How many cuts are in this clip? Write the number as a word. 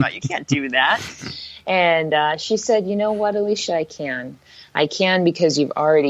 zero